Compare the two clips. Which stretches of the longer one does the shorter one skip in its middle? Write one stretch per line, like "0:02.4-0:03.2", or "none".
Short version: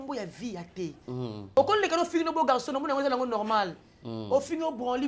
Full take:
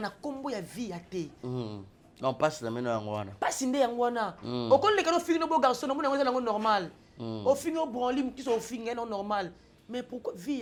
0:01.9-0:04.7